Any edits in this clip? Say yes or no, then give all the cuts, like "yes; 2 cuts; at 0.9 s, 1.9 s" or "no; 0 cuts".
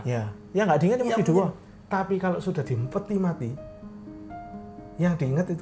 no; 0 cuts